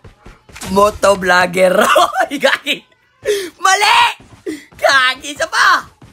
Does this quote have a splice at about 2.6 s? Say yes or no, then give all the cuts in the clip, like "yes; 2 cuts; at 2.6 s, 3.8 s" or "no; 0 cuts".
no; 0 cuts